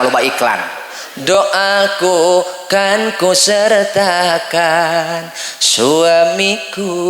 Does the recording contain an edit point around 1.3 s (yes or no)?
yes